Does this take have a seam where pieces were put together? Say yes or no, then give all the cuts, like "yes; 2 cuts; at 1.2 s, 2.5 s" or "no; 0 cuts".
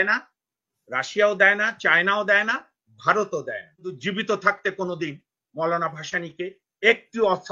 yes; 1 cut; at 4.0 s